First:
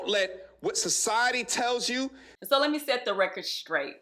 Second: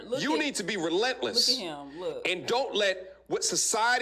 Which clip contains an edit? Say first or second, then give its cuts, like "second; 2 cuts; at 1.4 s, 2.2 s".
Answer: first; 1 cut; at 2.3 s